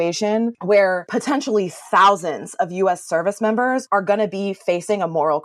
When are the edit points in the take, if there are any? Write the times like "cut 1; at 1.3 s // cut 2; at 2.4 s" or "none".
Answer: cut 1; at 0.8 s // cut 2; at 3.8 s